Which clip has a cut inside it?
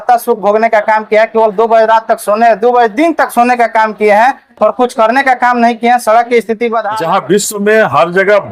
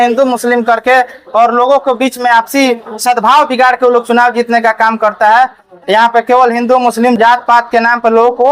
first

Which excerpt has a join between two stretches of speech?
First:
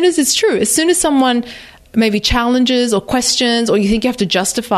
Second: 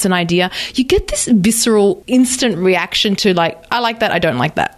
second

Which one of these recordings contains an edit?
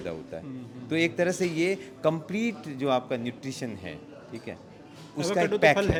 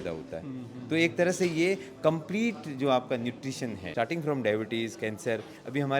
second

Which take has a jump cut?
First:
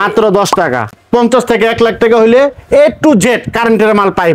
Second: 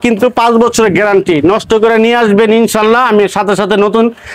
first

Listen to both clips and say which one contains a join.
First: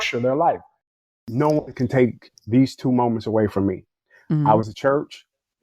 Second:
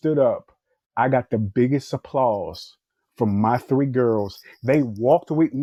first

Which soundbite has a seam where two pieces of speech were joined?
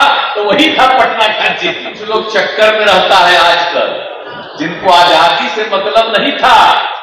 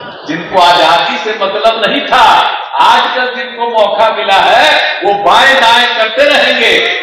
first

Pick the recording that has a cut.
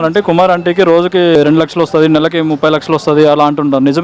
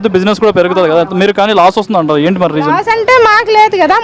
first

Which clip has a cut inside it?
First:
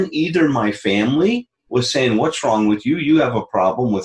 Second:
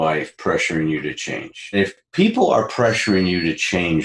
second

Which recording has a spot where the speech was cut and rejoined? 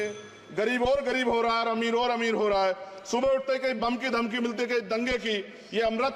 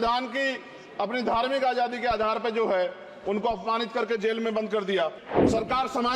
second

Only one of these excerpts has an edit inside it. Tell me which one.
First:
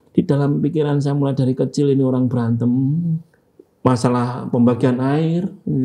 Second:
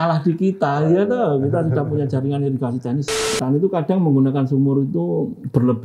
second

